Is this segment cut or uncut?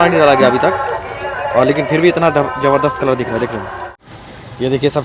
cut